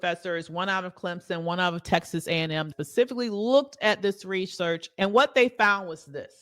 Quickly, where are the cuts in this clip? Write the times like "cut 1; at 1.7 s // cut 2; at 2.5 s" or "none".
cut 1; at 2.7 s // cut 2; at 4.9 s